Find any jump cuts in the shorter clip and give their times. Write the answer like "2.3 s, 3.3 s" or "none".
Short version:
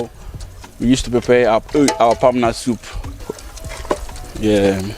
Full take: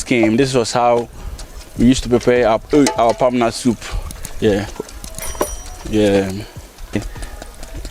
3.3 s